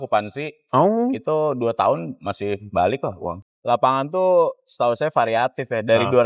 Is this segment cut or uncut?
cut